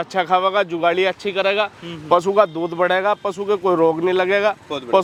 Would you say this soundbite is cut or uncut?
uncut